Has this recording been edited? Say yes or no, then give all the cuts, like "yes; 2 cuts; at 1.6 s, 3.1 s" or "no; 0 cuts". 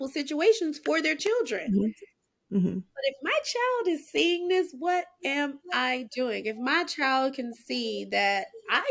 no; 0 cuts